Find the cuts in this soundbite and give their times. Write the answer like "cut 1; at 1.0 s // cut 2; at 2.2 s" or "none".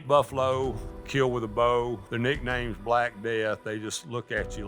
cut 1; at 0.9 s // cut 2; at 2.0 s